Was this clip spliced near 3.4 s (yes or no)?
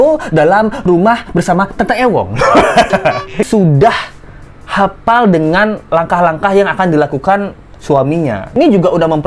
yes